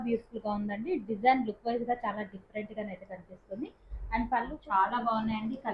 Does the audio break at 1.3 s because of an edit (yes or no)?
no